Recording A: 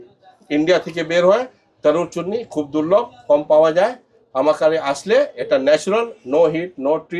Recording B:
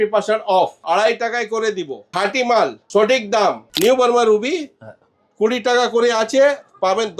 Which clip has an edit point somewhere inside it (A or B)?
B